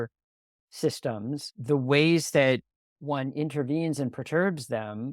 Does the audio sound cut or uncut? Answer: cut